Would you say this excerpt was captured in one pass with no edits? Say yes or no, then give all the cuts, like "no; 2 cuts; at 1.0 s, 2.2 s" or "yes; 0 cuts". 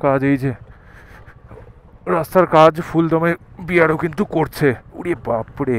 yes; 0 cuts